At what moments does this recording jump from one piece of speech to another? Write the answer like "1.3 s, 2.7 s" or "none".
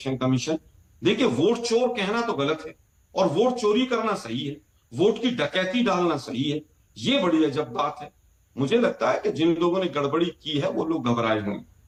none